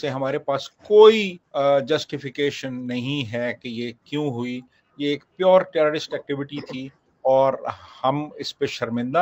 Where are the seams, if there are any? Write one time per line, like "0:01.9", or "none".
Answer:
0:01.4